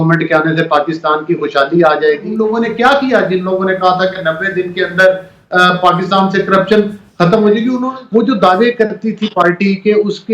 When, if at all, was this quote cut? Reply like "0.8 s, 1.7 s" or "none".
2.3 s, 7.8 s